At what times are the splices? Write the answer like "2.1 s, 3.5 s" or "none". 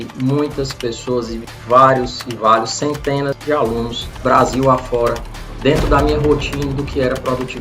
5.5 s